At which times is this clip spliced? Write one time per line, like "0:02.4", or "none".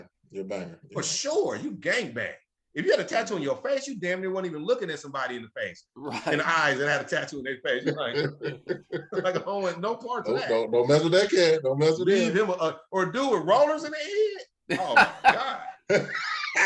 none